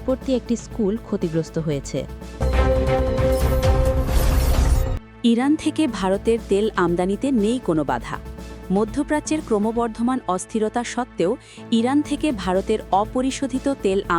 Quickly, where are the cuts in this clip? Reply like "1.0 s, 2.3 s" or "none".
2.3 s

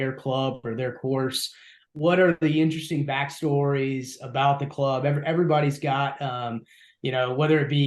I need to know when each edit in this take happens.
1.8 s

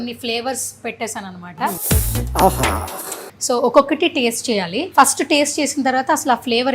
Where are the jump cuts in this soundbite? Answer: 1.8 s, 3.3 s, 4.8 s

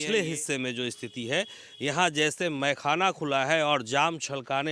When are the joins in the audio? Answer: none

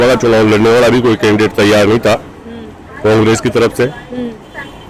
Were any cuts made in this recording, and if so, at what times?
none

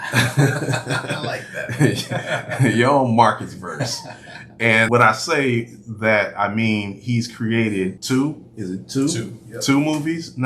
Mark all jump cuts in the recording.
4.9 s, 8.0 s

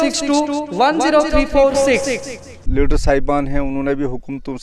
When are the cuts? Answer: 2.6 s

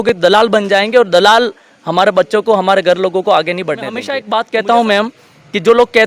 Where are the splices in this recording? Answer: 4.1 s

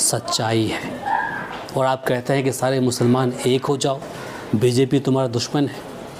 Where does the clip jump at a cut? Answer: none

